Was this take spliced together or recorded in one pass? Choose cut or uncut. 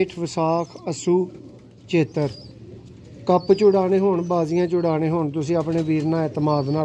uncut